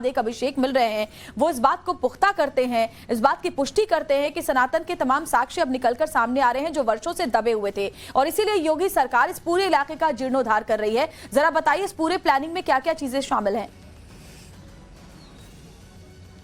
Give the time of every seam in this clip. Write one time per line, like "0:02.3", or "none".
none